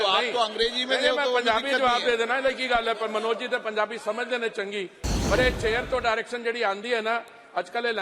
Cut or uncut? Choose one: uncut